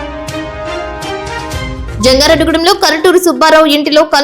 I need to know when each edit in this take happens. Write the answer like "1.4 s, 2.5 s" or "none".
1.8 s

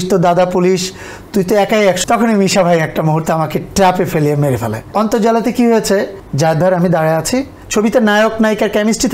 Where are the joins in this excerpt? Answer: 2.0 s, 4.8 s, 6.2 s, 7.6 s

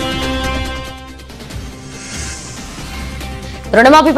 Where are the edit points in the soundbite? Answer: none

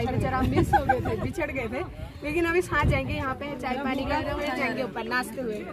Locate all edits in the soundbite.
none

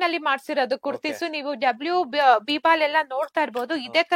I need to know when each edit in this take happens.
none

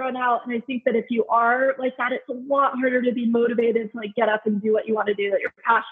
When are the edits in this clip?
none

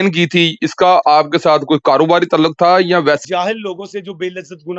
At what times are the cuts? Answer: 3.2 s

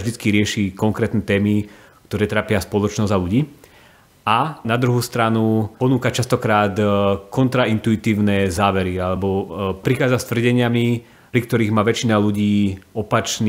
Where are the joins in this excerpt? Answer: 4.6 s

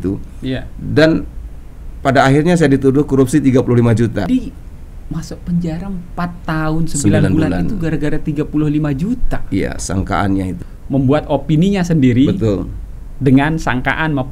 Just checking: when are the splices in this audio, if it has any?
4.3 s, 10.7 s

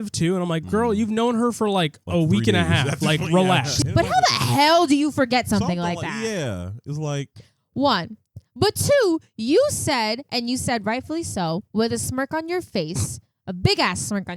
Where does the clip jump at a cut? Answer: 3.7 s

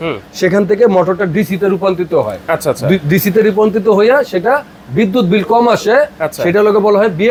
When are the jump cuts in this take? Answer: none

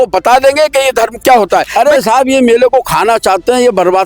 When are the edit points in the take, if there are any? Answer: 1.7 s

